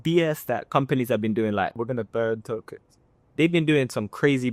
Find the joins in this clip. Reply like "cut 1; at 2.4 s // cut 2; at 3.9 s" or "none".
none